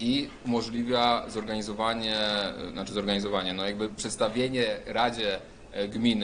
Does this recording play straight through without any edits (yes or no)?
yes